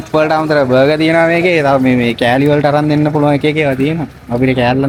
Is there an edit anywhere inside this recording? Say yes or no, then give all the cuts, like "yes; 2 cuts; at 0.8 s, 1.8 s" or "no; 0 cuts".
no; 0 cuts